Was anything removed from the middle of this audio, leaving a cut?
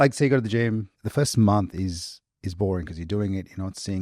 yes; 1 cut; at 1.0 s

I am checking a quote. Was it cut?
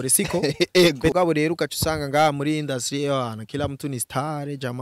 yes; 1 cut; at 1.1 s

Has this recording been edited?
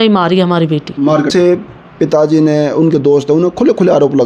yes; 1 cut; at 1.3 s

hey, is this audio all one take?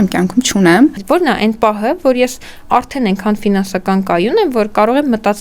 no; 1 cut; at 1.0 s

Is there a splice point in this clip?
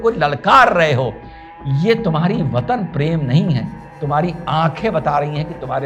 no; 0 cuts

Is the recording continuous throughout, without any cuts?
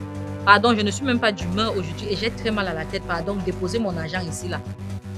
yes; 0 cuts

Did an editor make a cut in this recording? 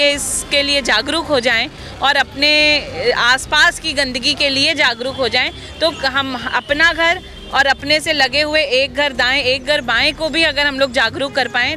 no; 0 cuts

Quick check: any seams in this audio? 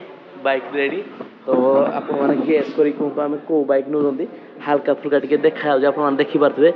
no; 0 cuts

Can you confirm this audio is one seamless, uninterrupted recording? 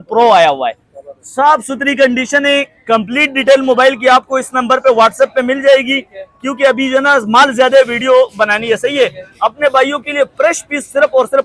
yes; 0 cuts

